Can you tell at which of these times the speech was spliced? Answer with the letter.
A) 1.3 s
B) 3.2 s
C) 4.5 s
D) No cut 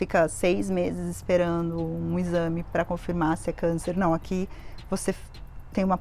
D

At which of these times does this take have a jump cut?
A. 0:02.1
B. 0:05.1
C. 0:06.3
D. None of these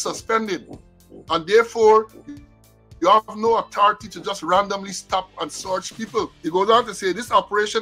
C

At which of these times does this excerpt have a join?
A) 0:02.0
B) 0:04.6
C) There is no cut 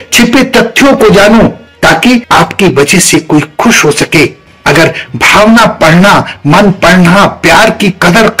A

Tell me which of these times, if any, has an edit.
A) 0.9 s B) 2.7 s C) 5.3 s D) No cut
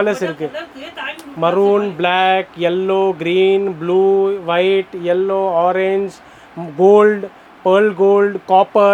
D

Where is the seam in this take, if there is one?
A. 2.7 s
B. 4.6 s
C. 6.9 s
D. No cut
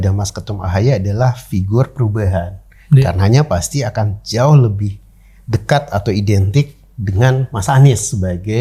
D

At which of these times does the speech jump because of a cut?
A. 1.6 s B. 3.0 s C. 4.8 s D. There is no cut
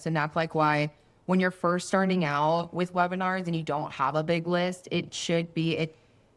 D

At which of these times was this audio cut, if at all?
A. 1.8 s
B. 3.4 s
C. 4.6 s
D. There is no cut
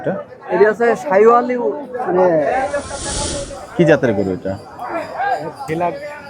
B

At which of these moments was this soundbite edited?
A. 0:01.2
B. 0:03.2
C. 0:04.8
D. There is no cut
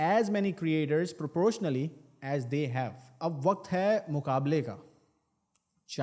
B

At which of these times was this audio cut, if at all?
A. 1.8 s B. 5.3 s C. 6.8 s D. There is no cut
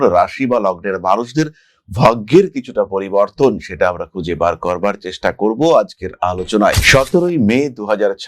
C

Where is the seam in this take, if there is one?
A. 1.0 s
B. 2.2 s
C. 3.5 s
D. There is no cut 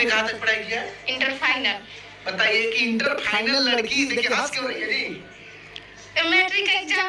D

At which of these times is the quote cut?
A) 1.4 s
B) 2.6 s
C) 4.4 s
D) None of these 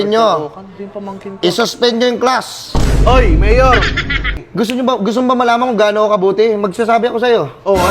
C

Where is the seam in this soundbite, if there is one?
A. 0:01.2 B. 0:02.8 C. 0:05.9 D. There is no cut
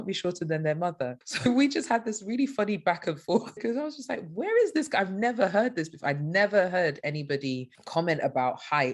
A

